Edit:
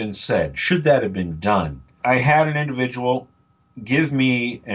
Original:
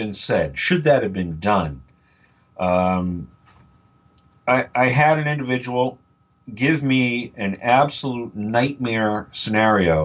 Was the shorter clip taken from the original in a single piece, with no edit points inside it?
no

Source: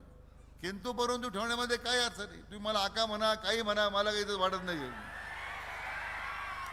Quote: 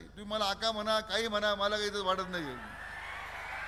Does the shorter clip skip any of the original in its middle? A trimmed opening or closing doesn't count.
no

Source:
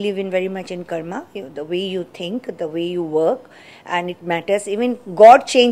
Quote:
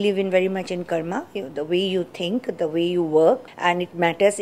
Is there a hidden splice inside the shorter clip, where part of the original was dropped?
yes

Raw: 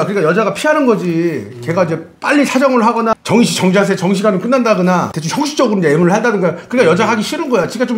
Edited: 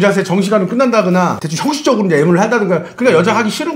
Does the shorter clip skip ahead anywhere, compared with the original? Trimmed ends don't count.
no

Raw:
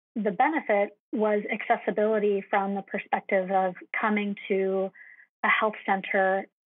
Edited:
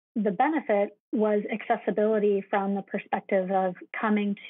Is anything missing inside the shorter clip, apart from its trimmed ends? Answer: no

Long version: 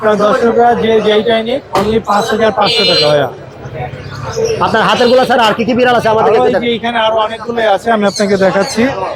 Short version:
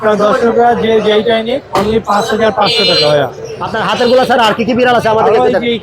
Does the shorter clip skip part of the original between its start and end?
yes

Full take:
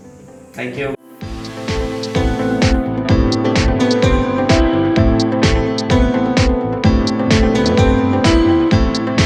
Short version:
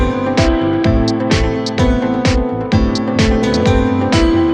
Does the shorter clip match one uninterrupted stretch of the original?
yes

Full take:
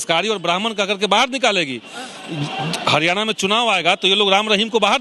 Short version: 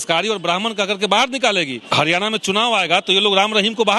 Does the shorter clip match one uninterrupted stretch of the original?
no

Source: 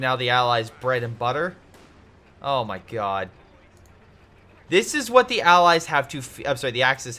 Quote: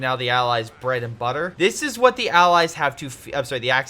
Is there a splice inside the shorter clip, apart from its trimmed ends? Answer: yes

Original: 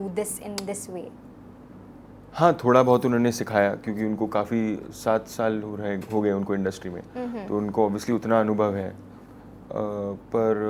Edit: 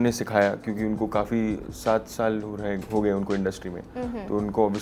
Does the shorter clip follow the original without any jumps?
yes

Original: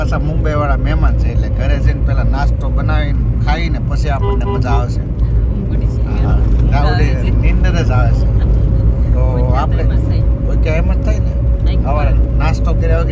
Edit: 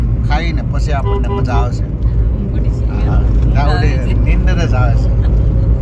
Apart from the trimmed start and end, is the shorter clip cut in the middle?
no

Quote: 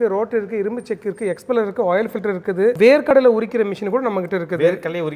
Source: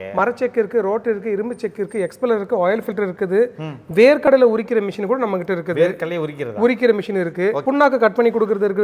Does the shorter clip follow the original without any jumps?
no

